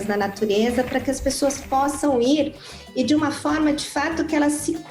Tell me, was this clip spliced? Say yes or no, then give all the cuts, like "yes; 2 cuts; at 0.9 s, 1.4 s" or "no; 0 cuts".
no; 0 cuts